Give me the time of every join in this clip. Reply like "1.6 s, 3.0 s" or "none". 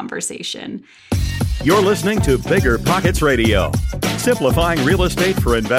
0.9 s